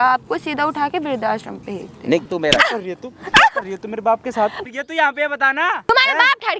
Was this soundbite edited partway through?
yes; 3 cuts; at 2.3 s, 4.6 s, 5.9 s

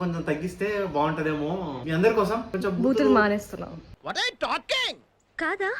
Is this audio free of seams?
no; 2 cuts; at 1.8 s, 2.5 s

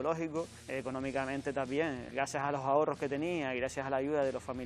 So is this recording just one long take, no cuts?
yes; 0 cuts

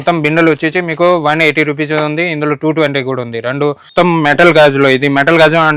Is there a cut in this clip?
yes; 1 cut; at 3.8 s

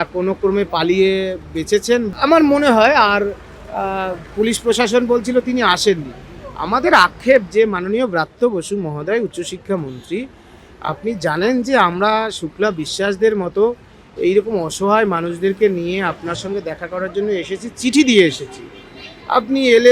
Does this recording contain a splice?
yes; 1 cut; at 2.1 s

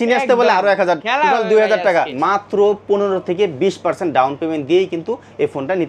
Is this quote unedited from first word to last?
no; 1 cut; at 2.1 s

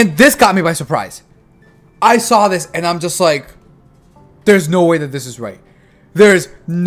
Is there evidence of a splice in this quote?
no; 0 cuts

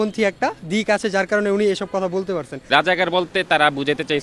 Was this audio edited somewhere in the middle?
yes; 1 cut; at 2.7 s

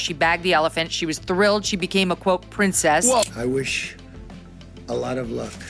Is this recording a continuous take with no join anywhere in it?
no; 1 cut; at 3.2 s

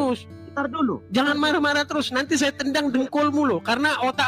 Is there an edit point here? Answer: no; 0 cuts

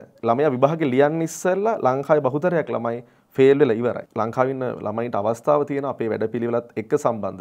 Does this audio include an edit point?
yes; 1 cut; at 4.0 s

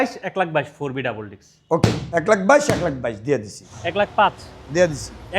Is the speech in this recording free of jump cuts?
no; 1 cut; at 4.1 s

